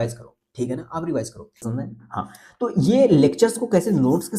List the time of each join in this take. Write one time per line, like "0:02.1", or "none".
0:01.6